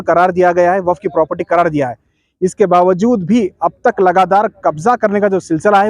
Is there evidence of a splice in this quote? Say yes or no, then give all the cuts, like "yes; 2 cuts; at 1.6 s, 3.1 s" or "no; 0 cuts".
no; 0 cuts